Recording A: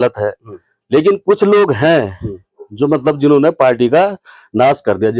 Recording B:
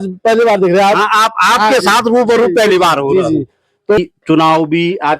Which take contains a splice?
B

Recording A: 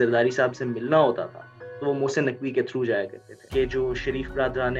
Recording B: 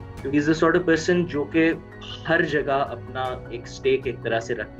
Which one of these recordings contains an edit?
A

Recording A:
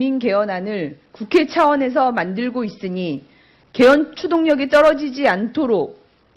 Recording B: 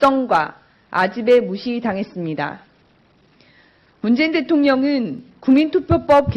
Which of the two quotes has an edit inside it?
A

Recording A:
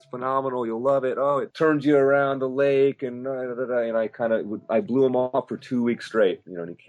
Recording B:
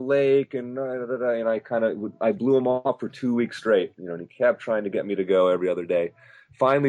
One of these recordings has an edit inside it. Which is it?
A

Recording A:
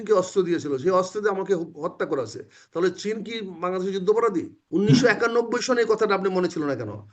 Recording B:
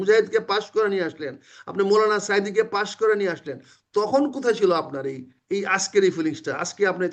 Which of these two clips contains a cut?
A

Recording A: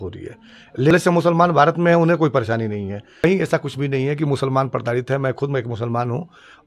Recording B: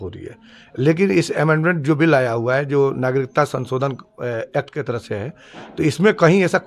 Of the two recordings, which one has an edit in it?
A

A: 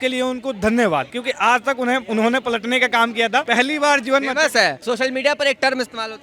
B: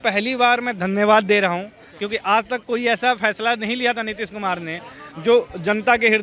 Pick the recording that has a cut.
A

